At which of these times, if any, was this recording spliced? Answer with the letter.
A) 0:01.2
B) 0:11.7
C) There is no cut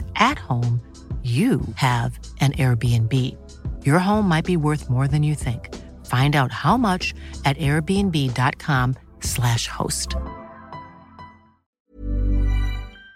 B